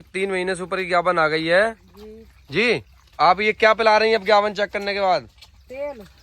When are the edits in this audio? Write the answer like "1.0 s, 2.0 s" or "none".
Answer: 3.0 s